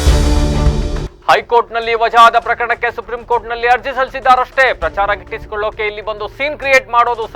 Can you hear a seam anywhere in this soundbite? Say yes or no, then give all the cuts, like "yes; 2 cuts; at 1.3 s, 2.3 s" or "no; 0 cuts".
yes; 1 cut; at 1.1 s